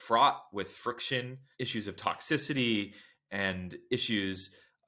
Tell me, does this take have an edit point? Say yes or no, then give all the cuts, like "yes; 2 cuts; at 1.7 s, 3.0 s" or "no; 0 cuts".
yes; 1 cut; at 1.4 s